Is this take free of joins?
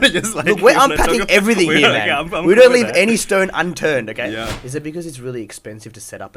no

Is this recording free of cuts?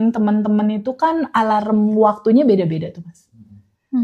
yes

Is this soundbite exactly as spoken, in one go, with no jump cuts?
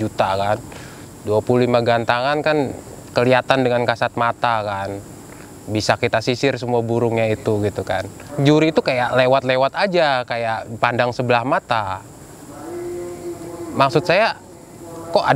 no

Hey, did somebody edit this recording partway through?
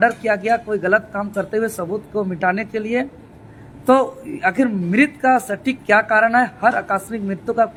no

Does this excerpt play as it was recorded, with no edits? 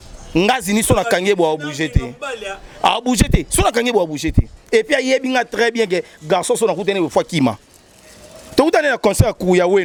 yes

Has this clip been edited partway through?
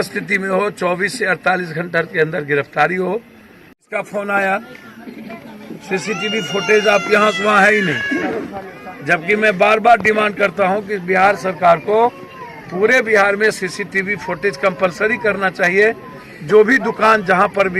no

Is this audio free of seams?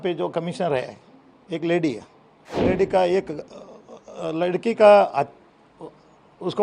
no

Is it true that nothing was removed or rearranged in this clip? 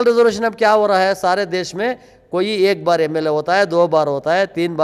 yes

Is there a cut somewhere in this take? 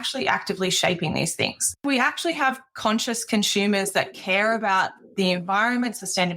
yes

